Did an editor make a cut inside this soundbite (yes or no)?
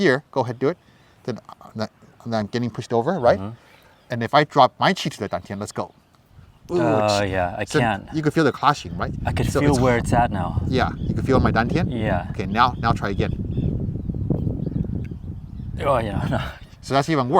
no